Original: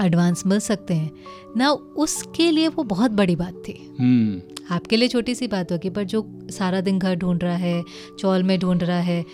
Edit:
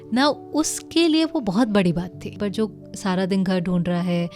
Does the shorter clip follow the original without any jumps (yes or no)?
no